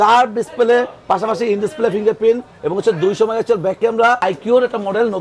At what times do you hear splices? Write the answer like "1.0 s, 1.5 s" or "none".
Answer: 4.2 s